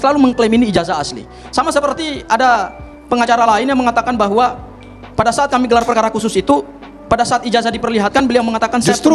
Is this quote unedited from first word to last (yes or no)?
yes